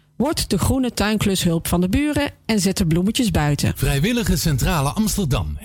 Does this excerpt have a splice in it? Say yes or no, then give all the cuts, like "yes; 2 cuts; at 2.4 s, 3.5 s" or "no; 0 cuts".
yes; 1 cut; at 3.8 s